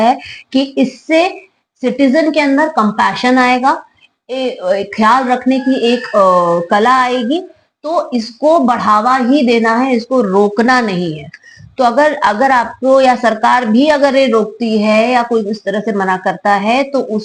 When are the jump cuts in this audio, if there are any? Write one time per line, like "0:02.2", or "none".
none